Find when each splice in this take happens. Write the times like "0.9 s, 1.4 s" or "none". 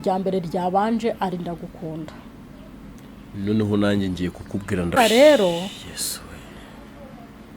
5.0 s

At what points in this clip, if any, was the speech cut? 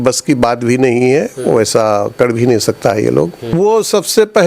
3.5 s

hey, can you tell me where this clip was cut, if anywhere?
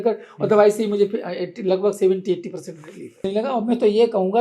3.2 s

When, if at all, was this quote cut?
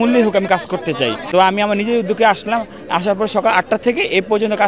1.2 s

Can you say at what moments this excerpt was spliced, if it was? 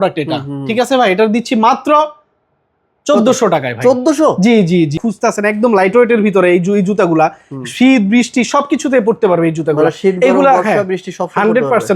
5.0 s

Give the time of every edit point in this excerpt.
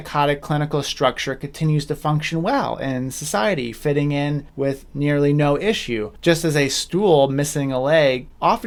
none

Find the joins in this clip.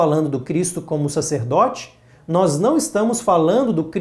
none

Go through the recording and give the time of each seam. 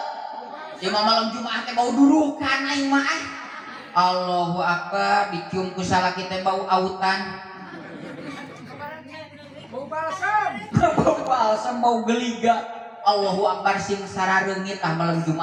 none

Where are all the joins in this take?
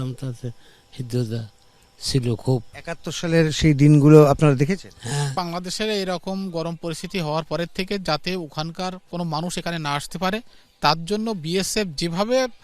5.3 s

